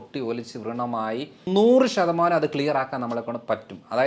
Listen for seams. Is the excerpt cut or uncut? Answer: cut